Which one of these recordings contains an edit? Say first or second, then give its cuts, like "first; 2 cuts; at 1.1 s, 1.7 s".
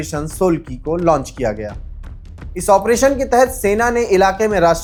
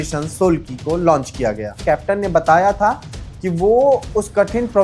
second; 1 cut; at 1.8 s